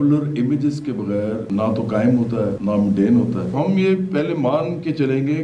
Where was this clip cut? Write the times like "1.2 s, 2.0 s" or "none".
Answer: 1.4 s, 2.6 s, 3.5 s